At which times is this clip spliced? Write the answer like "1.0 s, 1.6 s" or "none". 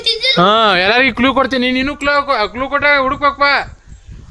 none